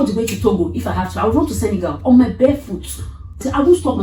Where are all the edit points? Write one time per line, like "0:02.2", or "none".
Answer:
none